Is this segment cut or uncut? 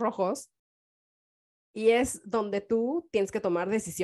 uncut